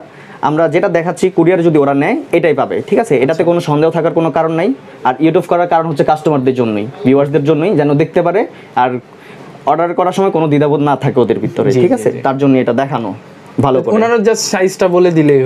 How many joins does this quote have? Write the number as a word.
zero